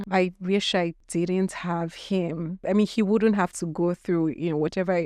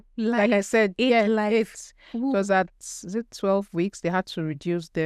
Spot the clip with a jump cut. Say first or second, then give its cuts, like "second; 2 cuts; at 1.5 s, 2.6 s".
first; 2 cuts; at 1.0 s, 2.6 s